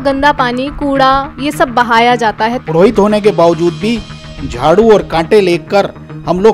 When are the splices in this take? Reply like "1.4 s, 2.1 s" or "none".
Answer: 2.6 s